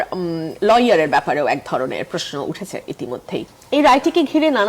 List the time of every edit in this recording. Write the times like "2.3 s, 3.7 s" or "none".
3.5 s